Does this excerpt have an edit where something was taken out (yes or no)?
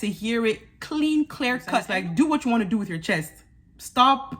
yes